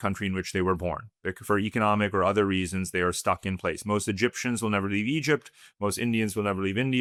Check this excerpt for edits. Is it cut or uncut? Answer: uncut